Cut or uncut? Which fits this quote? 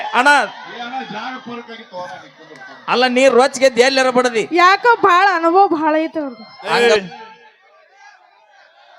cut